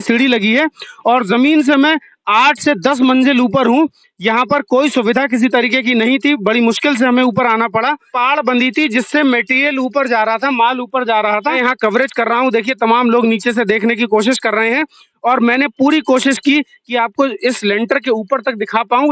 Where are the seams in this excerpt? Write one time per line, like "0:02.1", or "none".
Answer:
0:08.1
0:11.6